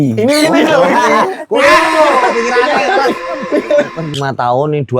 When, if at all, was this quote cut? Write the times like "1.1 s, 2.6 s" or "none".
4.1 s